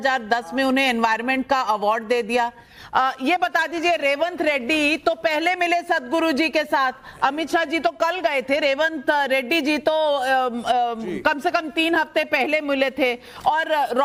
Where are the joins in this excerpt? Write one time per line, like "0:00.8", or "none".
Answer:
none